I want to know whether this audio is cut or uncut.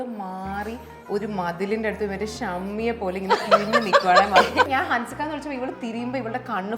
cut